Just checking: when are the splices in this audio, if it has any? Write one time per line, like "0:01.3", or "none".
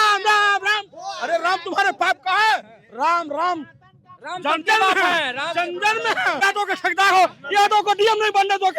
0:06.4